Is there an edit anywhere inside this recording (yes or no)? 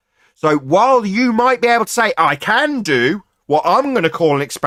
no